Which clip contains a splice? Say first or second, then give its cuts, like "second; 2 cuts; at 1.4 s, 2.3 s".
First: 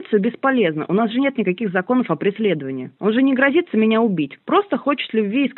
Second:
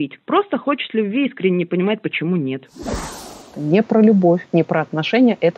second; 2 cuts; at 2.9 s, 4.4 s